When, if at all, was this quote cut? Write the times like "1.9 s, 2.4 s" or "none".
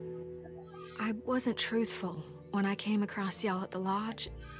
1.0 s